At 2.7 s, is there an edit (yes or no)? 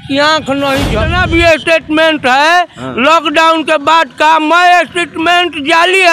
no